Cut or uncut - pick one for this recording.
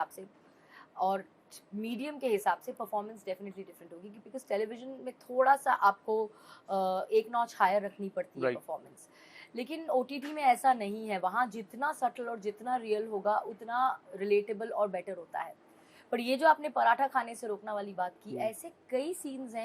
uncut